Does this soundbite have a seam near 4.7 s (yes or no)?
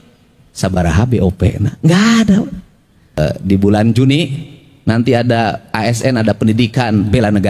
no